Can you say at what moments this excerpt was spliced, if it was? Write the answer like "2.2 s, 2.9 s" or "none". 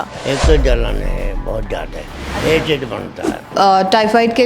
3.5 s